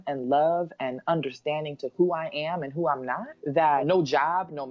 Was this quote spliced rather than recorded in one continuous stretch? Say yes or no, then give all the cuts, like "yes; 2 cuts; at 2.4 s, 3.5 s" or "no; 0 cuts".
yes; 1 cut; at 3.8 s